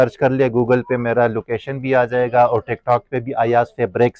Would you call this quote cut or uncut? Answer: uncut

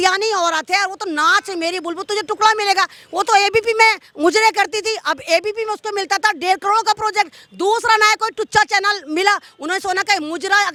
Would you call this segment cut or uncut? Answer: uncut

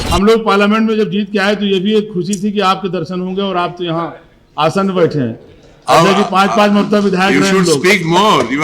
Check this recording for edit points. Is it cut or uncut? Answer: uncut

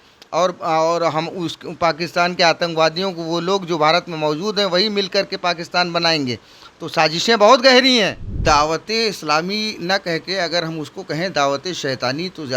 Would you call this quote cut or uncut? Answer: cut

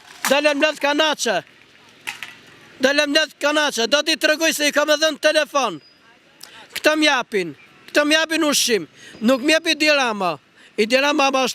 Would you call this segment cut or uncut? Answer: uncut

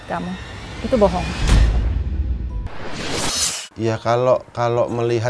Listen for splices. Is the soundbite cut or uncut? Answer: cut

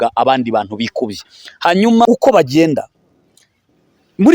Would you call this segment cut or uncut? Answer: cut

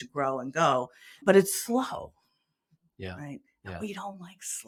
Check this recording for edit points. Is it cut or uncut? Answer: uncut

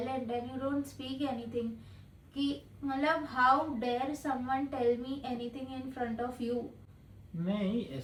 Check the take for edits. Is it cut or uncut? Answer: uncut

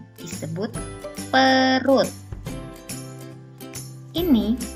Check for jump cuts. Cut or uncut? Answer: uncut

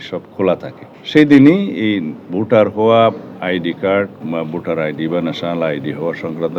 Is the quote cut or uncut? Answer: uncut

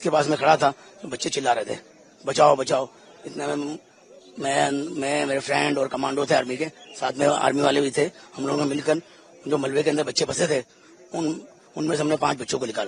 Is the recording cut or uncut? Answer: uncut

